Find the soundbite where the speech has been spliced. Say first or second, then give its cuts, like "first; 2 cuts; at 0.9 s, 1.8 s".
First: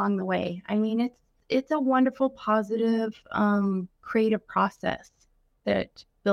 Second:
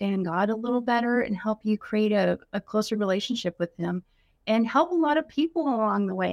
first; 1 cut; at 1.4 s